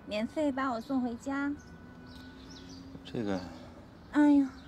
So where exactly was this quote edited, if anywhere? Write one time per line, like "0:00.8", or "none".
0:02.3